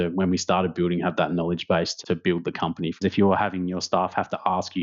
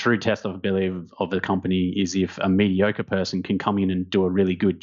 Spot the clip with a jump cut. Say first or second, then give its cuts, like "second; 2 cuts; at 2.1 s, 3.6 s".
first; 2 cuts; at 1.9 s, 3.0 s